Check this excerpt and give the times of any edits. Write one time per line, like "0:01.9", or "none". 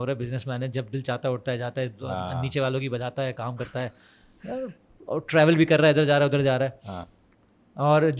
none